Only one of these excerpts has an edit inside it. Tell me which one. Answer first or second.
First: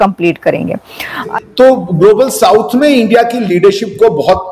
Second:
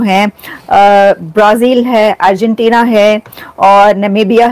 first